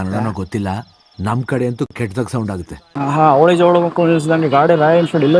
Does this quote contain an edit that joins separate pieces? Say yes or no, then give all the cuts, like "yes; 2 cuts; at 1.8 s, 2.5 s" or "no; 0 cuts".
yes; 1 cut; at 2.8 s